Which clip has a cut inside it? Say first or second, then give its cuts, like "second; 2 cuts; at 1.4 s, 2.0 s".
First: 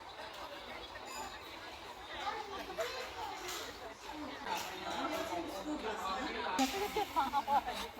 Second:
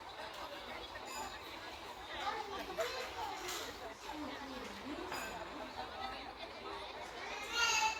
first; 2 cuts; at 4.5 s, 6.6 s